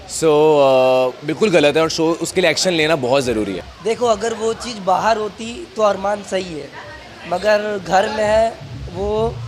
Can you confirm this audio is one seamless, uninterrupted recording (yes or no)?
no